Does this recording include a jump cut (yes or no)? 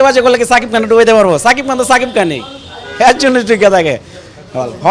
no